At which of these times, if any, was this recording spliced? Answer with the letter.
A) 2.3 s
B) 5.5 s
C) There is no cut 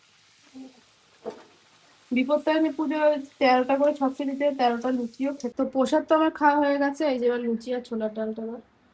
B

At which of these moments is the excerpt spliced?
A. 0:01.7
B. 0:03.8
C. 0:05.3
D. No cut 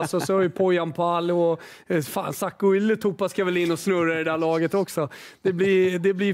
D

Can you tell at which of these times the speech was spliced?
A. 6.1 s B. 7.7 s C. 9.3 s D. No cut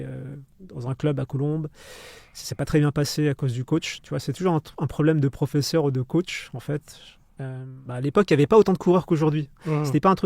B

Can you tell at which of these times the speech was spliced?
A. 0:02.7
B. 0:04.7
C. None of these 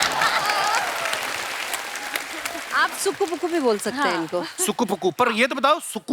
A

